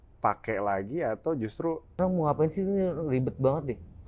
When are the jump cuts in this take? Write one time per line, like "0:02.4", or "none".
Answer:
0:02.0